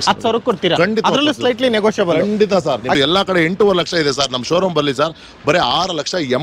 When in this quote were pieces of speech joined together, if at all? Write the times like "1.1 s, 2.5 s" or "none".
3.0 s